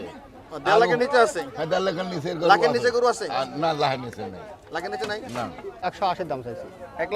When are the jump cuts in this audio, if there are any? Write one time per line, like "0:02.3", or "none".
0:05.7